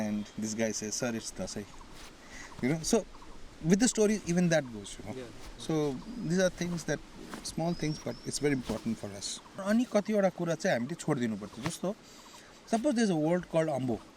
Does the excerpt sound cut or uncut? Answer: cut